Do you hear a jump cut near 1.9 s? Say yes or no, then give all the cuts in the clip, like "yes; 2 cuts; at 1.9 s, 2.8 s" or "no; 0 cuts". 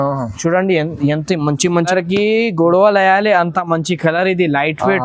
yes; 1 cut; at 1.9 s